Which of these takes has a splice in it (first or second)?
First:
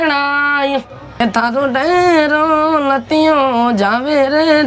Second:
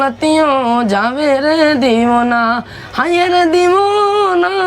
first